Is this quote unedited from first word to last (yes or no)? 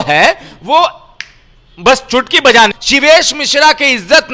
no